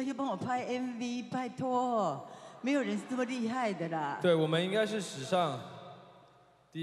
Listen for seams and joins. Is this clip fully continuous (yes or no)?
yes